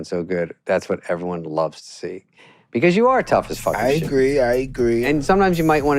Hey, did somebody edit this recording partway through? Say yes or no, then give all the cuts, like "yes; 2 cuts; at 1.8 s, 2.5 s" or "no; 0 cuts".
yes; 1 cut; at 5.0 s